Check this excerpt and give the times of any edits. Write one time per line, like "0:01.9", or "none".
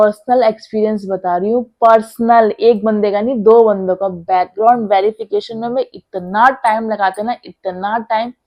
none